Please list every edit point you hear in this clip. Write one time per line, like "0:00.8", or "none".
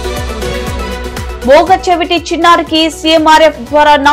0:01.3